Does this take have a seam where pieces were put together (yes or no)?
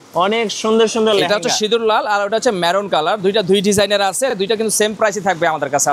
no